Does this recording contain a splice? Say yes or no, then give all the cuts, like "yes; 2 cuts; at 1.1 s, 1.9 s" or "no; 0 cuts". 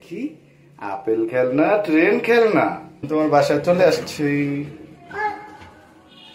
yes; 1 cut; at 2.9 s